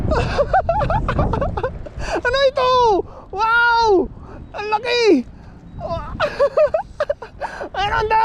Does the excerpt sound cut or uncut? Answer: uncut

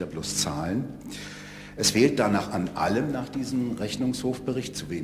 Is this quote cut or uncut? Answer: uncut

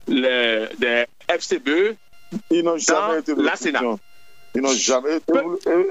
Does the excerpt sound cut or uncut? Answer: cut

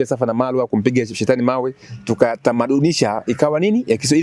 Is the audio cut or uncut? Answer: uncut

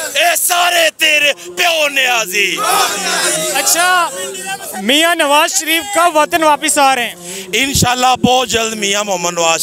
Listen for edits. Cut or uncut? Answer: uncut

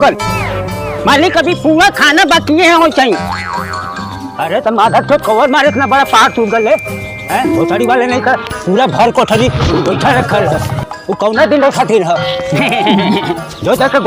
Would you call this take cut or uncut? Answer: uncut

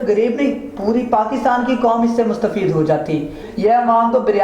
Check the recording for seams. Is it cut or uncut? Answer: cut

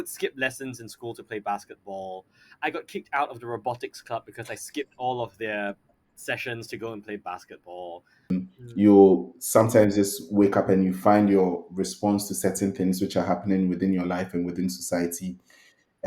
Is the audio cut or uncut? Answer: cut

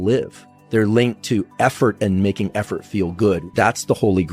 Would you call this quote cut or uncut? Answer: cut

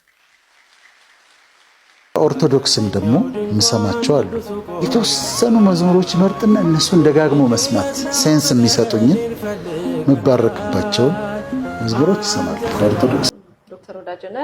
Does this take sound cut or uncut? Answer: cut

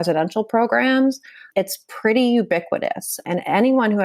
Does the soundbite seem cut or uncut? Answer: cut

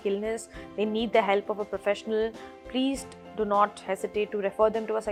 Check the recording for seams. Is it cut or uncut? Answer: uncut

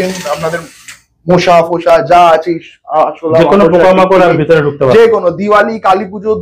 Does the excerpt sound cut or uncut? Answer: uncut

